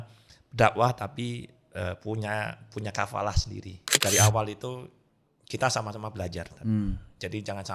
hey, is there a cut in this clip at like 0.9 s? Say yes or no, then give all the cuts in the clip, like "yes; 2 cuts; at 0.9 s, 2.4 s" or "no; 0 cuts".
no; 1 cut; at 3.9 s